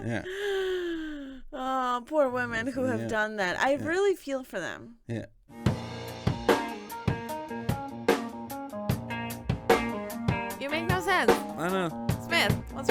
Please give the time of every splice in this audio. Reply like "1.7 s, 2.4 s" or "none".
5.4 s